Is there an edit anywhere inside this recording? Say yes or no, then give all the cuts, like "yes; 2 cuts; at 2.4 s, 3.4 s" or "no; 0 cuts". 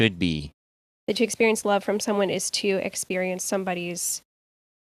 yes; 1 cut; at 0.9 s